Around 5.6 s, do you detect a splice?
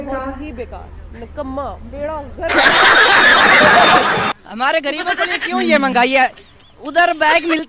no; 1 cut; at 4.3 s

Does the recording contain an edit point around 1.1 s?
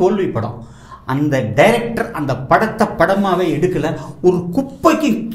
no; 0 cuts

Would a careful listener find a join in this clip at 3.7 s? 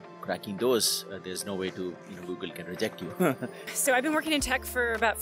yes; 1 cut; at 3.7 s

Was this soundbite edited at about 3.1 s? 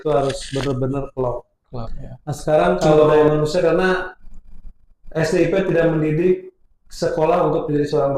yes; 1 cut; at 3.1 s

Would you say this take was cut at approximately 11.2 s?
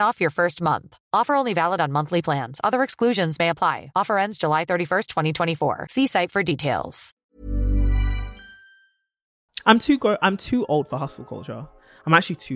no; 1 cut; at 9.5 s

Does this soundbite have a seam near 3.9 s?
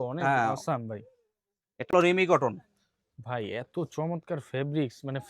no; 1 cut; at 1.9 s

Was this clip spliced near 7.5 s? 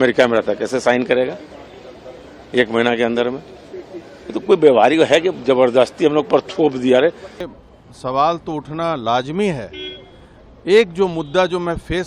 yes; 1 cut; at 7.5 s

